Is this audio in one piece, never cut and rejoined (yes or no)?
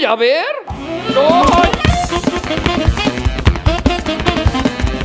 yes